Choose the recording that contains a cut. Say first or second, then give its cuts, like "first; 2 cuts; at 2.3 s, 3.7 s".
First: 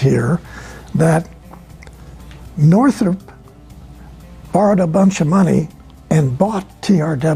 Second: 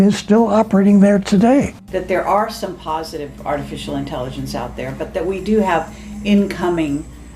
second; 1 cut; at 1.8 s